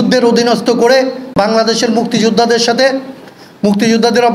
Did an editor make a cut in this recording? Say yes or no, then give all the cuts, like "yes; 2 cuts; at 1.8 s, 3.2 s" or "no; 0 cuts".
yes; 1 cut; at 1.3 s